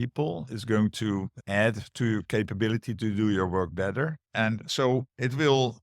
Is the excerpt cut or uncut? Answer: cut